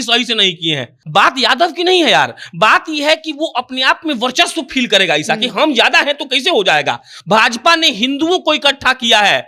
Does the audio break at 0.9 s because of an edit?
yes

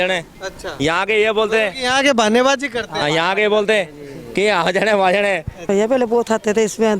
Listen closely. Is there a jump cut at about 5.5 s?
yes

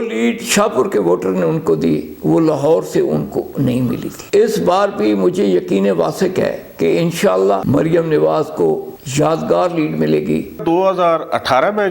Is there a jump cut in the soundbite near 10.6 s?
yes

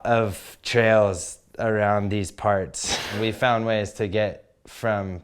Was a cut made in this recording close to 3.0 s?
yes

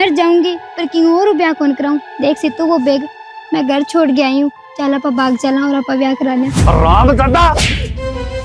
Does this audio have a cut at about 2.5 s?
no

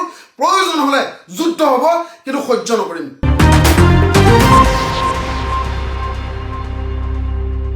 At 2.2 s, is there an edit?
no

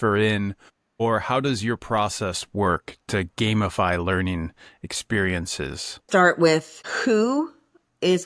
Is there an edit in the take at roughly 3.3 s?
no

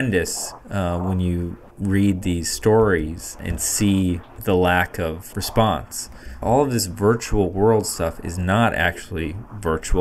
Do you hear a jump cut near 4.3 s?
yes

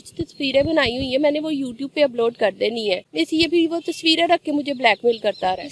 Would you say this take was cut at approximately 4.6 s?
no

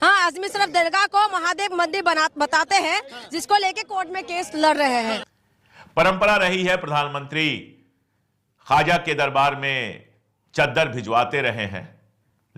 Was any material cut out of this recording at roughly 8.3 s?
no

